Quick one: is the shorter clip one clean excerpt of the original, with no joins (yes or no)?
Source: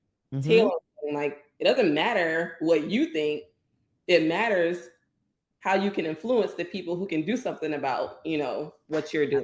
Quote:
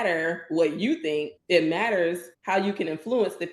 no